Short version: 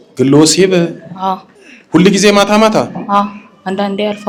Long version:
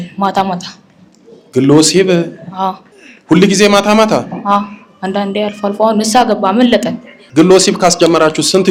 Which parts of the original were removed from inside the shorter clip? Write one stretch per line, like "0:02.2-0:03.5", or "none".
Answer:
none